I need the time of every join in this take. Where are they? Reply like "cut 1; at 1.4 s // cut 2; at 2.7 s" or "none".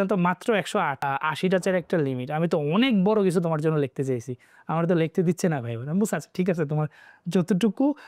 cut 1; at 1.0 s